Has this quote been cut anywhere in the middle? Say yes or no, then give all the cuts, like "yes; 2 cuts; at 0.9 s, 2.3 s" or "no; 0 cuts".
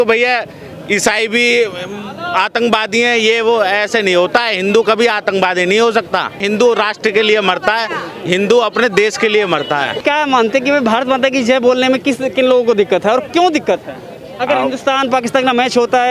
no; 0 cuts